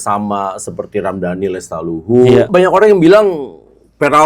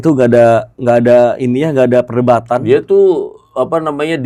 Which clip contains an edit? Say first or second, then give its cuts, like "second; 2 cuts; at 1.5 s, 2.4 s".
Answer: first; 1 cut; at 2.5 s